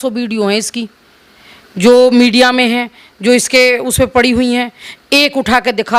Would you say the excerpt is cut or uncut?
uncut